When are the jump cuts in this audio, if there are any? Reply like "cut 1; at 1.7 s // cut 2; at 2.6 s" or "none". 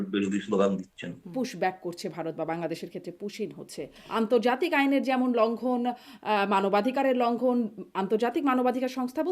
cut 1; at 1.2 s // cut 2; at 4.0 s